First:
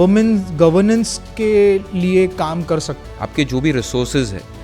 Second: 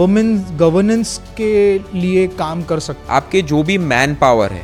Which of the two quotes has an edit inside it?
first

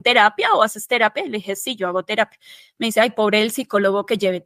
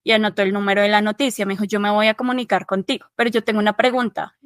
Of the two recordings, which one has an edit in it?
second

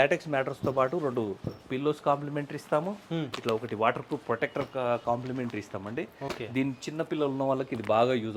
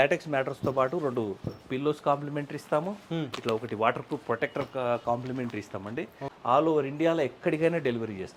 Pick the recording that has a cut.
second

